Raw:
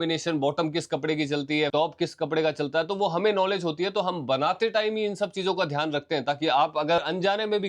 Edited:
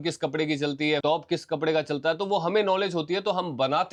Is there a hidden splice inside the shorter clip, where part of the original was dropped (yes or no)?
no